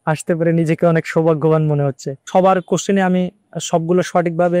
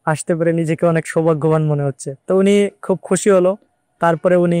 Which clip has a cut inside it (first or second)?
first